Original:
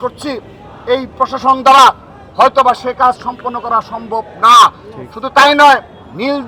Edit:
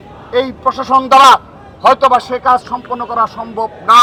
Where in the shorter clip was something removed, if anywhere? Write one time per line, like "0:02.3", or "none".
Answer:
none